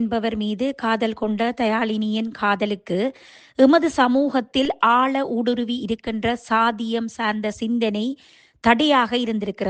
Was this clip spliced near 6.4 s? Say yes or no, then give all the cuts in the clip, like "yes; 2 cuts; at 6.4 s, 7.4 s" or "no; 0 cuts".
no; 0 cuts